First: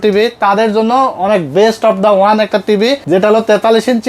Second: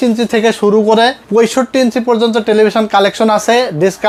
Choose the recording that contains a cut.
first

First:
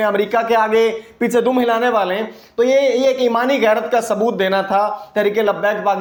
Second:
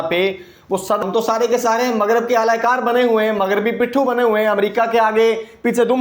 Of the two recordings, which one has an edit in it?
second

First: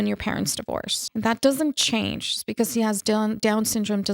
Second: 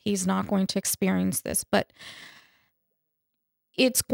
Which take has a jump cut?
first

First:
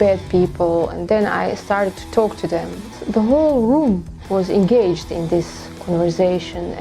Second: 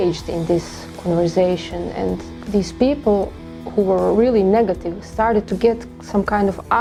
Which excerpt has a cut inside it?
first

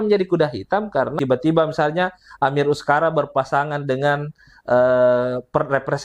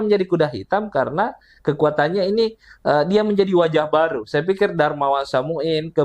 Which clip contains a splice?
first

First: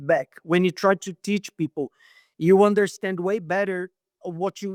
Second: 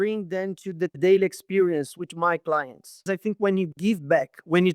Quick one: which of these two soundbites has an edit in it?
second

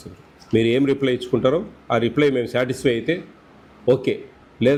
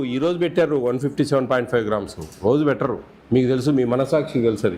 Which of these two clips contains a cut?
second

